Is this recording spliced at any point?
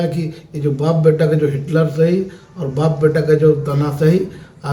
no; 0 cuts

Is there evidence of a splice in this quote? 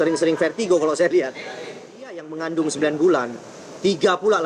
yes; 1 cut; at 2.3 s

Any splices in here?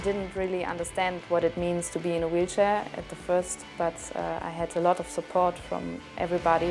no; 0 cuts

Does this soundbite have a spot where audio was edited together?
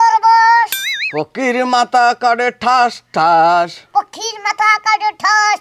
no; 0 cuts

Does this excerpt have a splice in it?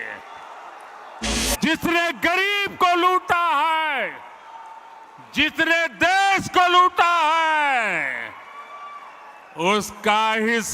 yes; 1 cut; at 1.3 s

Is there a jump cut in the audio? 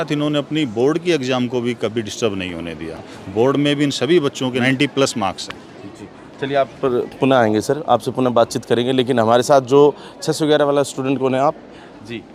no; 0 cuts

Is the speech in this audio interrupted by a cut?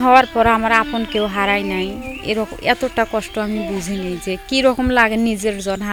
no; 0 cuts

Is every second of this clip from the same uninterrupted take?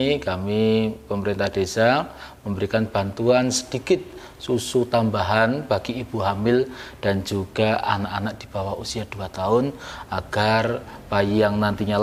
yes; 0 cuts

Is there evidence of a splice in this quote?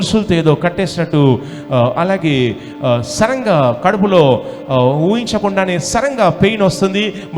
no; 0 cuts

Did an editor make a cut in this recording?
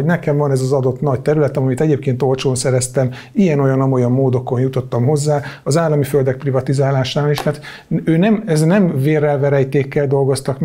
no; 0 cuts

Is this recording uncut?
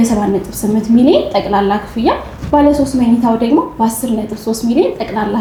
yes; 0 cuts

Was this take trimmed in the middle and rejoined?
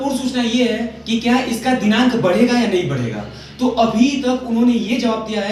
no; 0 cuts

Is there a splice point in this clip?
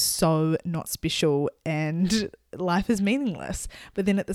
no; 0 cuts

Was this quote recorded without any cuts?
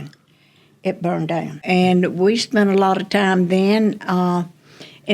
no; 1 cut; at 1.6 s

